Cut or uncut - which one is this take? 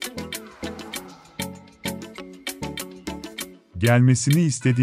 cut